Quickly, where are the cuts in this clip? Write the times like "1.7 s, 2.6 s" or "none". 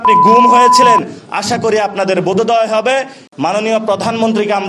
3.2 s